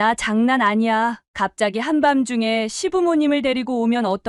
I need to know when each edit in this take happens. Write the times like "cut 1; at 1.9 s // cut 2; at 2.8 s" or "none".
none

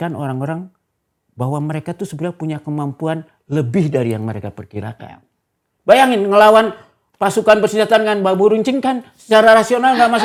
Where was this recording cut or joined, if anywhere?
none

